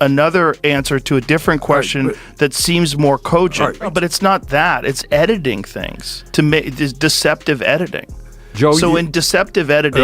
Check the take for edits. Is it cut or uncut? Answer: cut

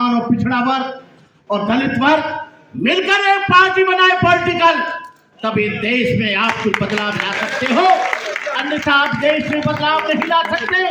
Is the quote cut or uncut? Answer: uncut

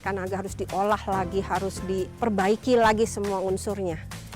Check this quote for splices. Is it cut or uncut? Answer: cut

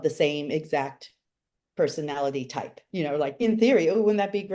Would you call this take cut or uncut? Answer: cut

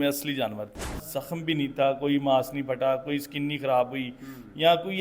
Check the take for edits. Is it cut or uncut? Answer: cut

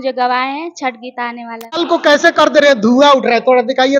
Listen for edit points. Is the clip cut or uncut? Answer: cut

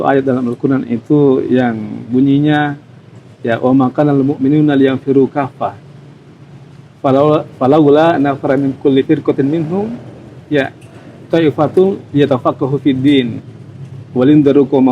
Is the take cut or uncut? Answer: uncut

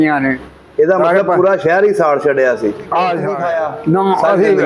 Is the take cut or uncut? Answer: cut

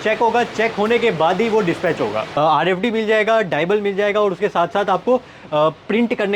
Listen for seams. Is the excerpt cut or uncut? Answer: cut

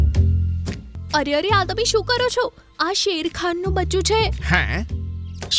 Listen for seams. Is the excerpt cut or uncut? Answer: cut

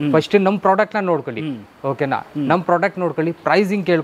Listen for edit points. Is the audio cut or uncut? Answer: uncut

